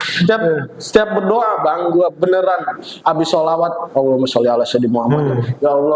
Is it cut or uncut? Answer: uncut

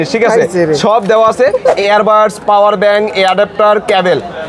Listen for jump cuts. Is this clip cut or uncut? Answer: cut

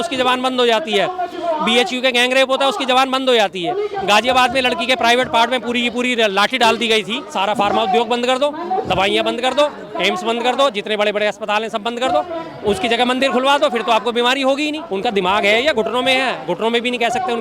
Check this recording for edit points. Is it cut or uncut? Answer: cut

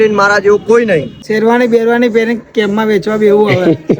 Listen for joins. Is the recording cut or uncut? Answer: cut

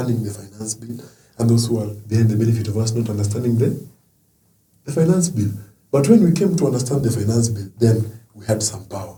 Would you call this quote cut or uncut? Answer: uncut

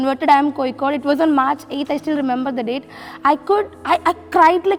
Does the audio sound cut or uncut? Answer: uncut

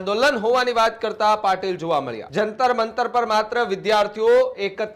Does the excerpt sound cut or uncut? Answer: cut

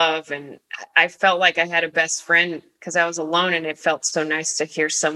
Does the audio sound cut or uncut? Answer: uncut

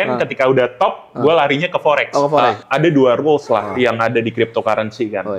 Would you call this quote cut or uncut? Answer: cut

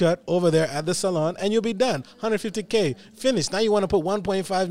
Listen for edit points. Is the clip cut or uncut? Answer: uncut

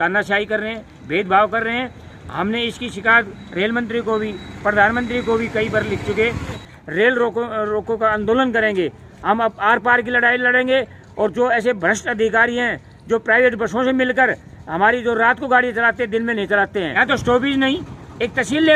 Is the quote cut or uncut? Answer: cut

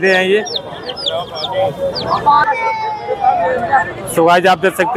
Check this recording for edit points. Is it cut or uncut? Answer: uncut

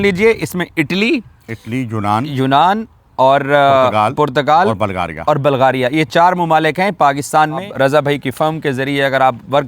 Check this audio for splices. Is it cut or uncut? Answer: cut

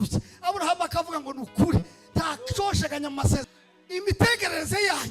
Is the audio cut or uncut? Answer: cut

